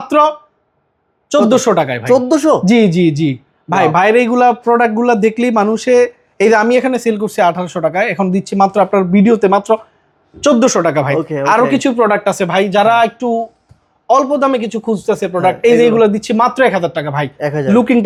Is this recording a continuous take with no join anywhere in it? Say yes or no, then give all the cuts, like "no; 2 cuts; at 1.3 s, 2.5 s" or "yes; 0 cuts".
yes; 0 cuts